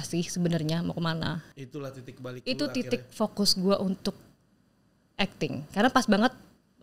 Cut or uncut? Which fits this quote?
cut